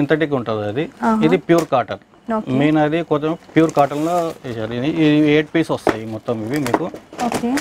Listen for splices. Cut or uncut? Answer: uncut